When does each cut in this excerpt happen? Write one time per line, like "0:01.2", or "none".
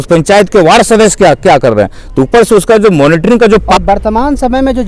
0:03.7

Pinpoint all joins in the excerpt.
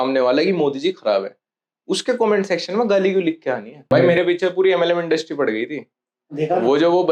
0:03.9

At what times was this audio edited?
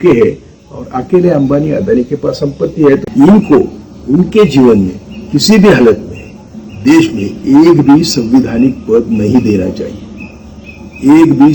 0:03.0

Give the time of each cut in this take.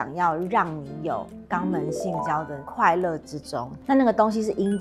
0:01.4
0:03.8

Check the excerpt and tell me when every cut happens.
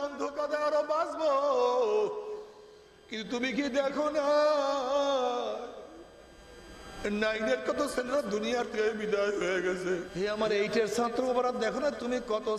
0:10.1

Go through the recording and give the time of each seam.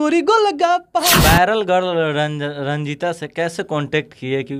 0:01.1

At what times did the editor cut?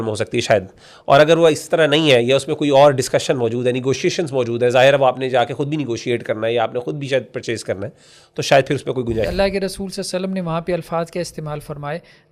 0:09.3

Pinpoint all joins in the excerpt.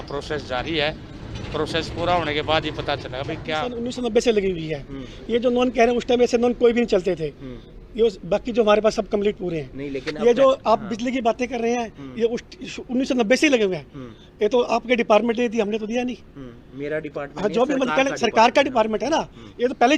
0:03.6

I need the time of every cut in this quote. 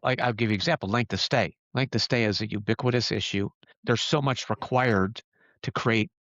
0:03.5

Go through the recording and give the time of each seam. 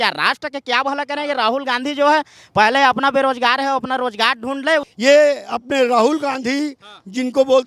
0:04.9

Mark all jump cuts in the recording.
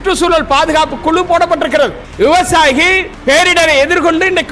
0:02.0
0:03.1

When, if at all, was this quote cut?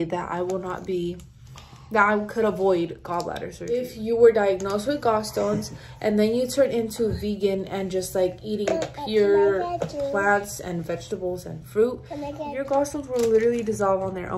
0:03.6
0:12.6

